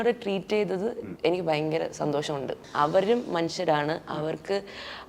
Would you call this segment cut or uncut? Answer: cut